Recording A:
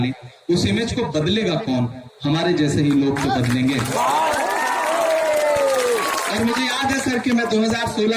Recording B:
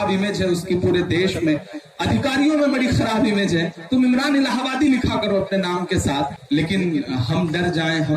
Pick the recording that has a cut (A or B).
B